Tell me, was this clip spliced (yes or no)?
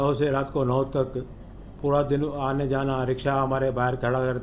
no